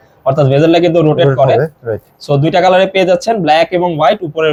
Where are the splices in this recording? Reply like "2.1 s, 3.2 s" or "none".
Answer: none